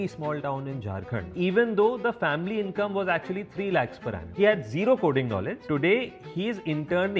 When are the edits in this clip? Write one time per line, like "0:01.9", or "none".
0:01.3
0:04.3
0:05.6